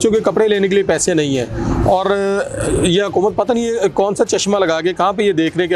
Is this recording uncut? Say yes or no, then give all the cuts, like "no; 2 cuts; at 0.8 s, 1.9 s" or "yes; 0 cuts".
yes; 0 cuts